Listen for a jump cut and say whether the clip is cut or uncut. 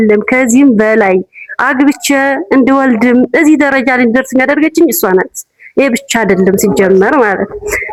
uncut